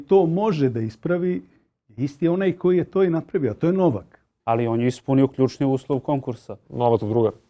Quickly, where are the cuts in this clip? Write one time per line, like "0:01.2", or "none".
0:04.4

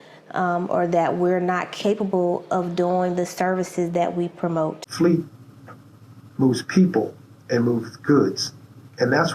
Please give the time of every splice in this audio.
0:04.8

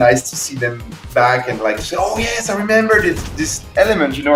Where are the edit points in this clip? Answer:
none

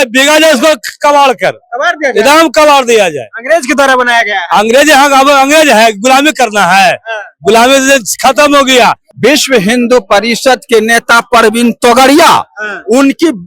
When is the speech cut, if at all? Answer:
0:09.1

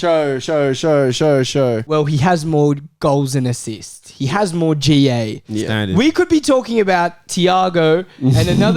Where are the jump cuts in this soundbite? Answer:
0:01.8

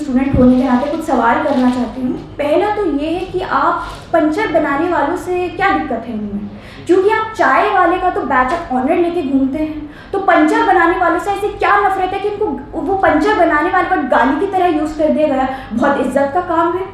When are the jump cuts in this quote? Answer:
none

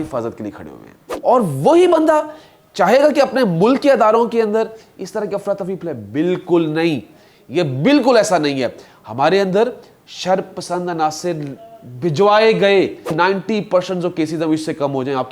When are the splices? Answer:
0:01.1
0:13.1

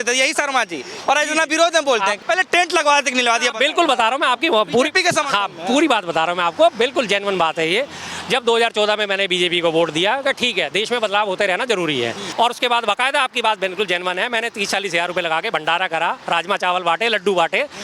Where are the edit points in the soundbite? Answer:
0:02.2
0:12.2

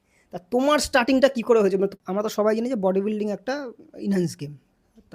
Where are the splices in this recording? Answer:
0:02.0

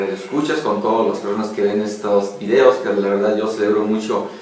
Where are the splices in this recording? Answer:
0:03.0

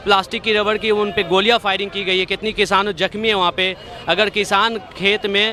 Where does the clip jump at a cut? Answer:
none

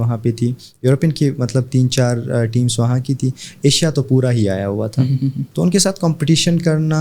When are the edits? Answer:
0:05.4

